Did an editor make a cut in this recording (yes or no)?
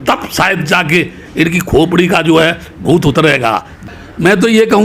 yes